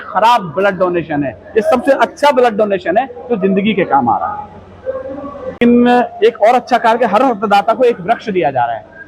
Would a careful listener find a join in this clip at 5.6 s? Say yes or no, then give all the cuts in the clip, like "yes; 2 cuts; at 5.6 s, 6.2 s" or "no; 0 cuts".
yes; 1 cut; at 5.6 s